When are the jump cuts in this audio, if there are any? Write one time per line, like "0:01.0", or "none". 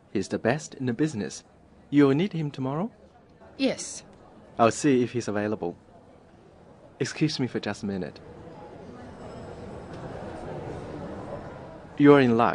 0:09.9